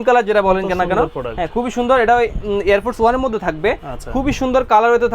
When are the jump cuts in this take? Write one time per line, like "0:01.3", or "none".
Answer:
none